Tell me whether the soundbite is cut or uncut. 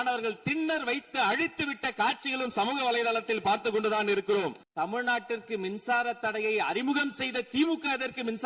cut